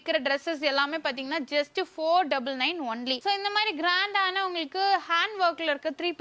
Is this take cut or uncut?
uncut